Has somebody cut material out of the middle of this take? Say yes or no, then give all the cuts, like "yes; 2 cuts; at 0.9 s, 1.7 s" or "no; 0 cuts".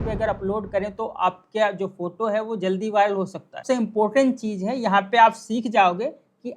yes; 1 cut; at 3.6 s